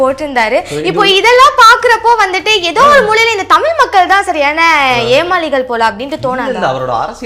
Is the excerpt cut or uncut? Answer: uncut